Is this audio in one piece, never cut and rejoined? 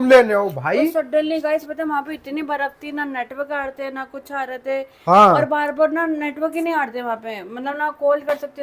yes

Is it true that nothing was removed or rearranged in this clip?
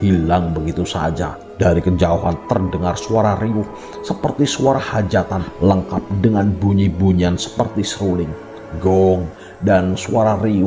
no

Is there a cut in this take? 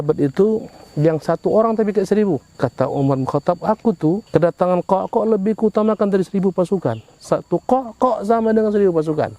yes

